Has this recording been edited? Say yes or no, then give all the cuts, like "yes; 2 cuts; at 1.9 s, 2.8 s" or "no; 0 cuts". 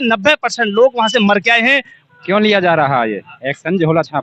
yes; 1 cut; at 1.9 s